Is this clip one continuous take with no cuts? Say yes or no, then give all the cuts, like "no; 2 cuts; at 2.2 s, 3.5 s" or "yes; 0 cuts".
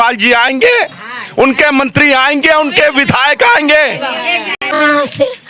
no; 1 cut; at 4.6 s